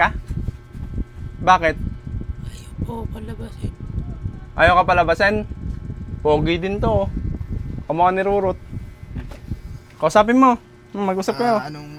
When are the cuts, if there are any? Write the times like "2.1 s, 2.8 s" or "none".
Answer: none